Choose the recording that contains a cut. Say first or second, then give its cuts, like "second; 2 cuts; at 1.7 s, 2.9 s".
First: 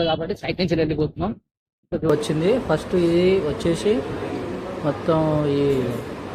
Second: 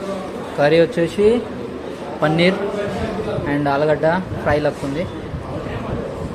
first; 1 cut; at 2.1 s